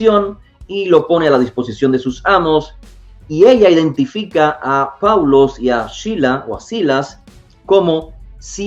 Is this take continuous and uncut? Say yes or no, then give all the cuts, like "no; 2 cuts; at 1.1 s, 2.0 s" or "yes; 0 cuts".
yes; 0 cuts